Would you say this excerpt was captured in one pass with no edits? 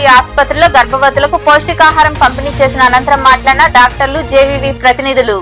yes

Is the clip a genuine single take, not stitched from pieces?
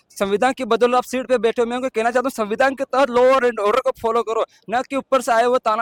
yes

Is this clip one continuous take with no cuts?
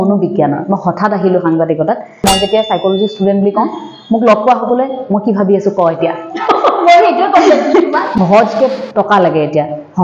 no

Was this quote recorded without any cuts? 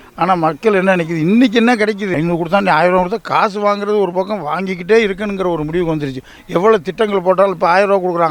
no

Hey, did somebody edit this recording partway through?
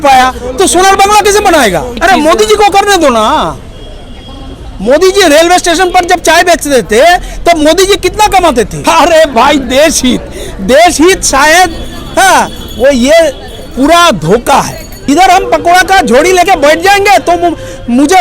yes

